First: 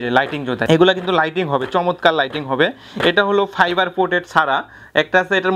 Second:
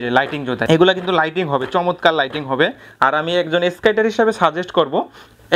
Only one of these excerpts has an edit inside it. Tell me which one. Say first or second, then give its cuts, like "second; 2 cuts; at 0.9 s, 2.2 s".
second; 1 cut; at 2.8 s